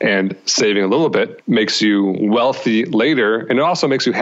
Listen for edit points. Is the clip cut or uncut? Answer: cut